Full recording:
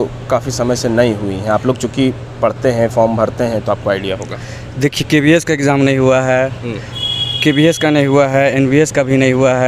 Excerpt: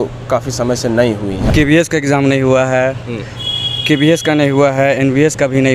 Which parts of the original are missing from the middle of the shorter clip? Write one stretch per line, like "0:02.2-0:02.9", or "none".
0:01.4-0:05.0